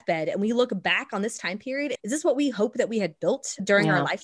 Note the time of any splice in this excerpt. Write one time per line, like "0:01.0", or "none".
0:01.9